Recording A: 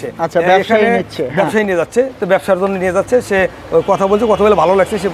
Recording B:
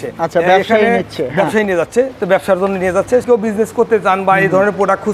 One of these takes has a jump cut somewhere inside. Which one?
B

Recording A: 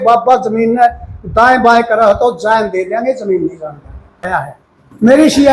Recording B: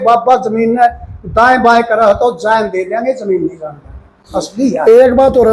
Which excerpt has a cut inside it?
A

